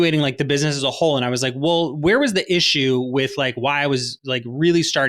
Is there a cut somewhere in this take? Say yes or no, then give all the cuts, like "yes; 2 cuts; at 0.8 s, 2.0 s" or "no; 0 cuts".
no; 0 cuts